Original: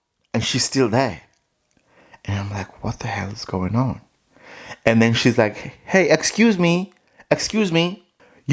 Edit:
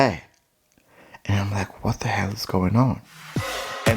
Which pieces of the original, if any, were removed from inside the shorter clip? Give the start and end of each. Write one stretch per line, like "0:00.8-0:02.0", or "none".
none